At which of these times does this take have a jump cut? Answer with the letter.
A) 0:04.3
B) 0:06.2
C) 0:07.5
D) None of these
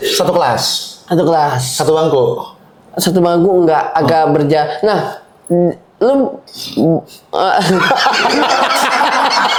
D